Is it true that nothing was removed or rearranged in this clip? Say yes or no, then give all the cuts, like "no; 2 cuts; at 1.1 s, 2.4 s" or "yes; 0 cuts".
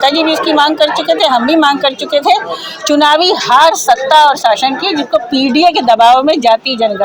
yes; 0 cuts